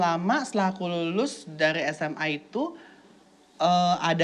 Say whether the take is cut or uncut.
uncut